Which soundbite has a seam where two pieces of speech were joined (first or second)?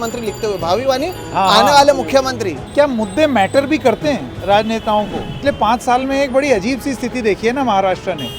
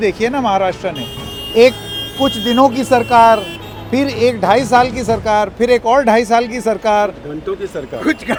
first